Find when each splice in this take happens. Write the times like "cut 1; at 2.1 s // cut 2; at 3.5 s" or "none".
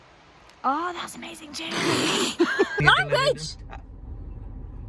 cut 1; at 2.8 s